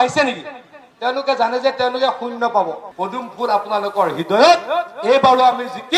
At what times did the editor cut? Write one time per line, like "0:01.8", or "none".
0:02.9